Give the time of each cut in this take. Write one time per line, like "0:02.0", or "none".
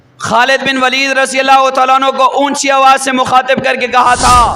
none

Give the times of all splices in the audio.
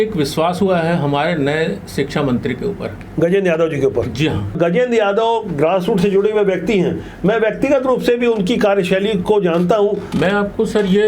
0:04.5
0:10.1

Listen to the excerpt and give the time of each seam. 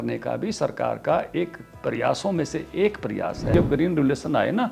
0:03.5

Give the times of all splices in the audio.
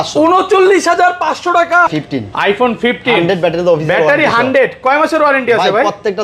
0:01.9

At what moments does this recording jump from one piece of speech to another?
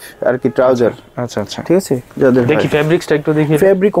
none

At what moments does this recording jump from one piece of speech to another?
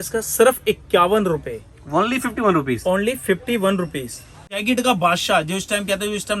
0:04.6

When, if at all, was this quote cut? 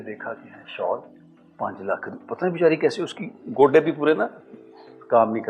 none

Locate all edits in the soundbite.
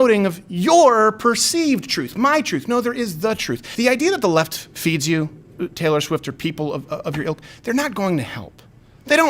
0:03.6

